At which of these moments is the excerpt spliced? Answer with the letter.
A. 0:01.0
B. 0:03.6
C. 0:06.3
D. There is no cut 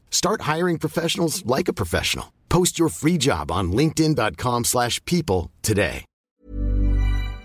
C